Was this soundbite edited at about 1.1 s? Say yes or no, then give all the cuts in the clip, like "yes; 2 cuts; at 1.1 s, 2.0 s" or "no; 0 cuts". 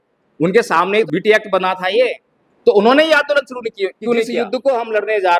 yes; 2 cuts; at 1.1 s, 4.4 s